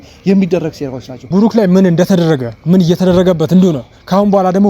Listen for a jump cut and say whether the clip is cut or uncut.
cut